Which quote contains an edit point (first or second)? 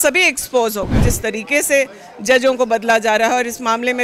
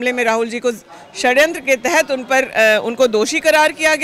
first